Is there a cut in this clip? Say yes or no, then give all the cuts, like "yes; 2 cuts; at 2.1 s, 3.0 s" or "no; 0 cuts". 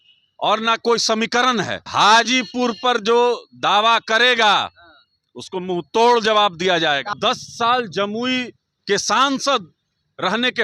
yes; 2 cuts; at 1.8 s, 7.1 s